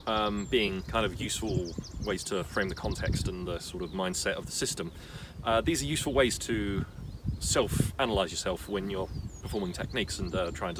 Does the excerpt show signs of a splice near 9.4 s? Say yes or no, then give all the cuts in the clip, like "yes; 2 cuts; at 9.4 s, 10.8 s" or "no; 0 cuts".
no; 0 cuts